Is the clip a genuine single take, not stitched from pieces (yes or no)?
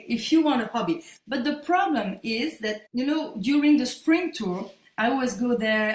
yes